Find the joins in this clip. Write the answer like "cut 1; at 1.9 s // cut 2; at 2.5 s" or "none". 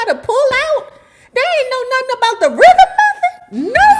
none